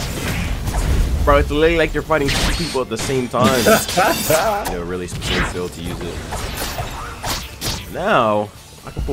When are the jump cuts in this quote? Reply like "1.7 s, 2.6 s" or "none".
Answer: 4.7 s